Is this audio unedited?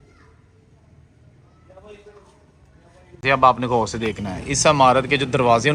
no; 1 cut; at 3.2 s

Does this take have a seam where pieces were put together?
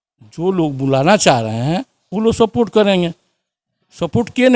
no; 0 cuts

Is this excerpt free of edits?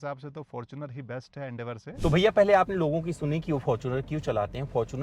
yes; 0 cuts

